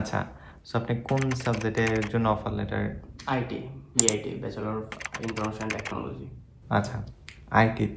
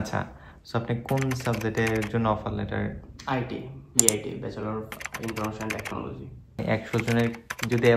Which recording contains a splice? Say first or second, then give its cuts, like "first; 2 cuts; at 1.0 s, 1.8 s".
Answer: second; 1 cut; at 6.6 s